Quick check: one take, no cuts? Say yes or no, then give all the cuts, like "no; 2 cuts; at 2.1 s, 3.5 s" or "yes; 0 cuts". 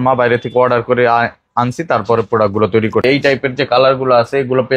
no; 1 cut; at 3.0 s